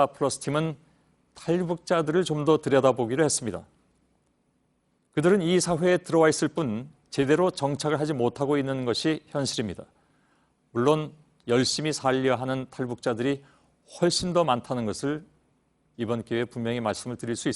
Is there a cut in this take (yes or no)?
yes